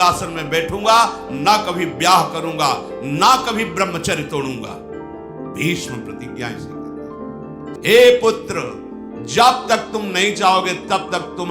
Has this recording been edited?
yes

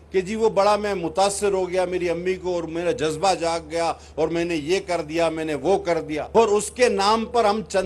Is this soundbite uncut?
no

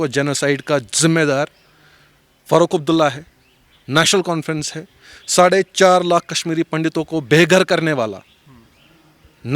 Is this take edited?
no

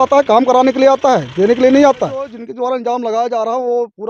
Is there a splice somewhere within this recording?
yes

